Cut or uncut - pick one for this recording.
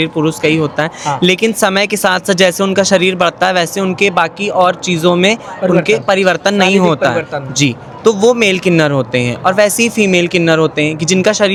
uncut